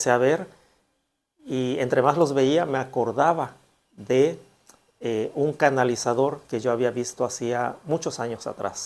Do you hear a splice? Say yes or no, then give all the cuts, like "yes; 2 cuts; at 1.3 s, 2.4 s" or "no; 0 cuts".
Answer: no; 0 cuts